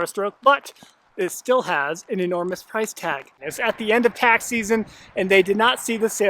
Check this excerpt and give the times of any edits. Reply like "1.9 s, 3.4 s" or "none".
3.4 s